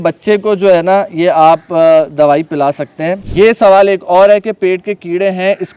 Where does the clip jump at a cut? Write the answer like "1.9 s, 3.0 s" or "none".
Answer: 3.2 s

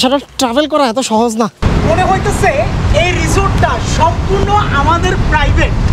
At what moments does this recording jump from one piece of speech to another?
1.6 s

